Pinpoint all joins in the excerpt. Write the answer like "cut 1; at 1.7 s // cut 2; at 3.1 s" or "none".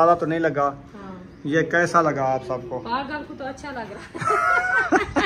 none